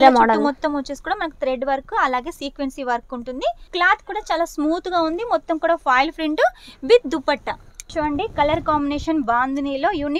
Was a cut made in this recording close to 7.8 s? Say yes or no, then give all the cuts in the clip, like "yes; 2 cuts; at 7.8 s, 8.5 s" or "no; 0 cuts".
yes; 2 cuts; at 3.6 s, 7.8 s